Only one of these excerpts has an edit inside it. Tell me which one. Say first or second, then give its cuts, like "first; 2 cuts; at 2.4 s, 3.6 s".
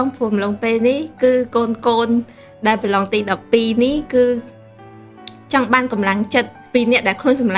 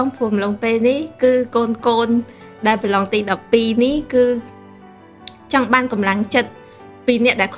first; 1 cut; at 6.6 s